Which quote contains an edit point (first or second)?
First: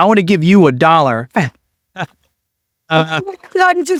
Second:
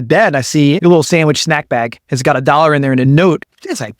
second